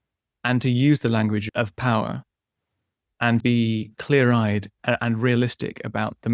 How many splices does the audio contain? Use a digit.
3